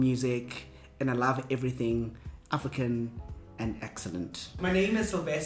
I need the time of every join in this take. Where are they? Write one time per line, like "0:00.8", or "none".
0:04.5